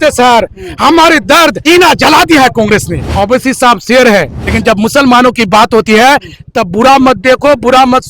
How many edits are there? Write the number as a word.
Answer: three